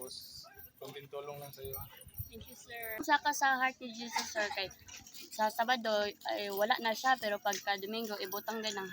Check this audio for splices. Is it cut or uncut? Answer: cut